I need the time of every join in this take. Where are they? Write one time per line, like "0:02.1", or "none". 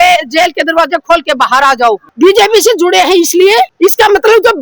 0:02.1
0:03.7